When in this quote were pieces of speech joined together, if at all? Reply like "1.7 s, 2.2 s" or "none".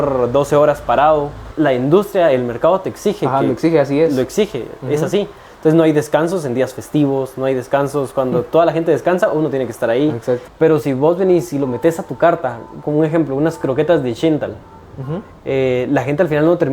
1.4 s, 10.5 s